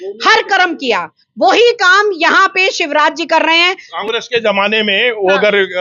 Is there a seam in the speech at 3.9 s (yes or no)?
yes